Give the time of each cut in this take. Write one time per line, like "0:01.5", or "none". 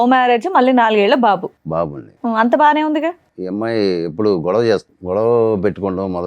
0:03.3
0:04.9